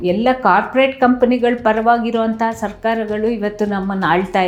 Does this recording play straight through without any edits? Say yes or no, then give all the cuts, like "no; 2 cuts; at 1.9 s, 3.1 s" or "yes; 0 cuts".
yes; 0 cuts